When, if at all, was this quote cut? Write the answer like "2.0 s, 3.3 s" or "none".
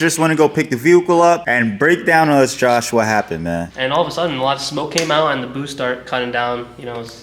1.4 s, 3.7 s

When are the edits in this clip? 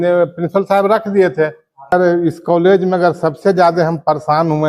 1.9 s

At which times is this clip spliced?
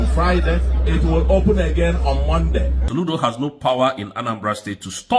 2.8 s

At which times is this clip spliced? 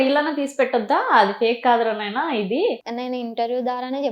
2.8 s

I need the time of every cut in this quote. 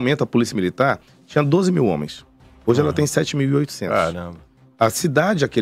none

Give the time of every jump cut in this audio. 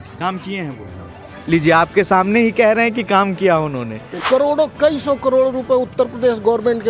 4.2 s

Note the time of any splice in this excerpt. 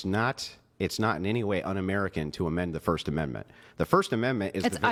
none

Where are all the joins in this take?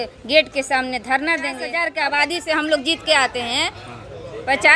1.8 s

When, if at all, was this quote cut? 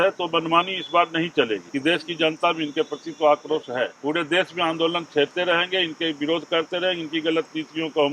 1.7 s, 4.0 s

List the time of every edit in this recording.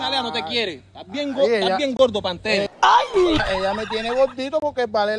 none

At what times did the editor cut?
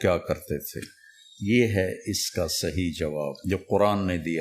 3.3 s

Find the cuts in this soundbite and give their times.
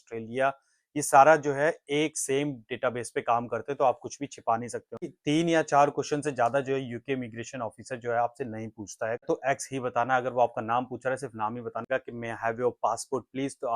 5.1 s, 9.2 s, 11.9 s

